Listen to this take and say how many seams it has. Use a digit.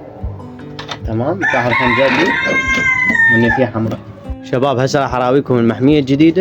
1